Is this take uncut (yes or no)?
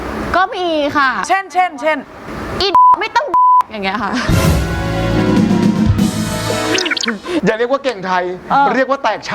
no